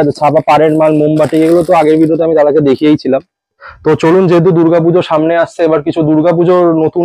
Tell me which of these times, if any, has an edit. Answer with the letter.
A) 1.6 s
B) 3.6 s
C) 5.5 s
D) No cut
B